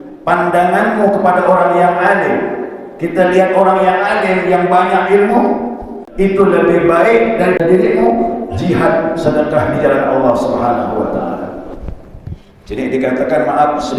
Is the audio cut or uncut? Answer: cut